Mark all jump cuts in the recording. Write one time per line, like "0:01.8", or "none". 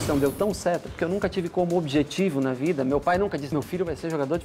0:03.5